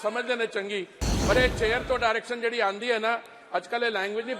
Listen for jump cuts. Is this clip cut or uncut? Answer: uncut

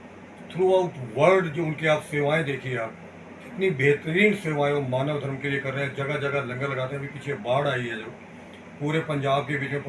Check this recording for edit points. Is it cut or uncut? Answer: uncut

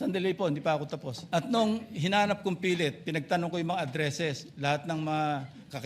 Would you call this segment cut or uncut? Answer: cut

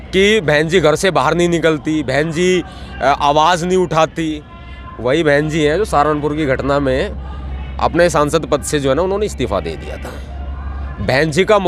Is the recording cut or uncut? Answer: uncut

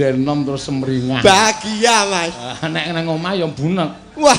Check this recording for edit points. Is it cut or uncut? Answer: uncut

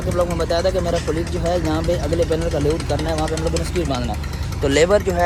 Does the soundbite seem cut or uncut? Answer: uncut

